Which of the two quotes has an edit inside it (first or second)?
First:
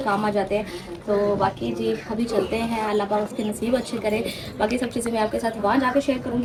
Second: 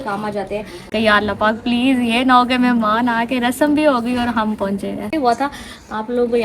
second